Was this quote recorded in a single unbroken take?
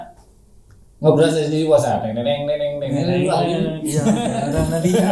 yes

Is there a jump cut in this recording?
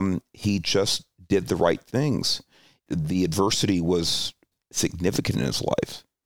yes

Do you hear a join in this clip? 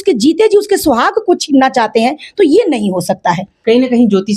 no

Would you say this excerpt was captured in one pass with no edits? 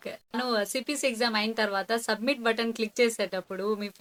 yes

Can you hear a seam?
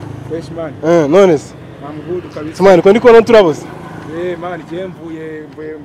no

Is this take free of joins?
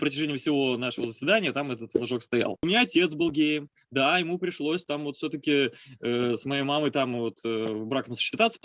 no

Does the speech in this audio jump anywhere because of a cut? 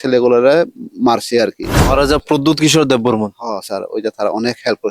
yes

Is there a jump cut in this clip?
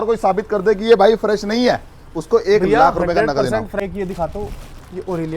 yes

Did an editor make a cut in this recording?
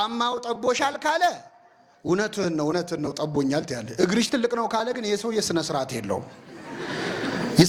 no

